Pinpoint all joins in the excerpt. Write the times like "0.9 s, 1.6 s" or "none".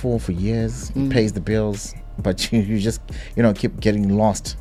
none